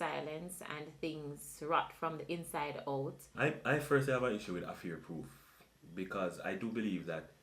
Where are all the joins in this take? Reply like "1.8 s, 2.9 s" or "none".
3.3 s

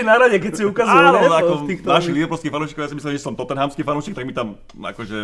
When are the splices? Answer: none

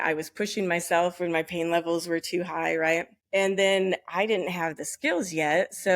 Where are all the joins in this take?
3.2 s

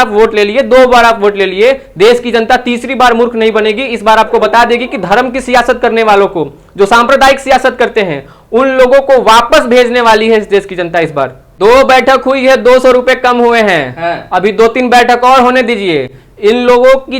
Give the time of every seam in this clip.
11.4 s

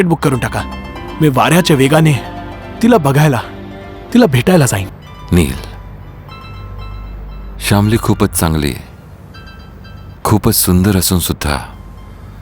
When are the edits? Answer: 5.0 s

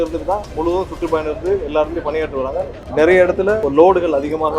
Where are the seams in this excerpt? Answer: 2.9 s, 3.6 s

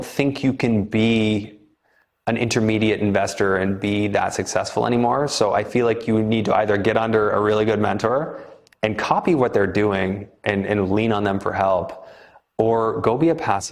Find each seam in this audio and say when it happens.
none

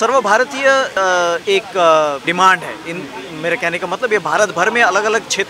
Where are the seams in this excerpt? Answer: 0.9 s, 2.2 s

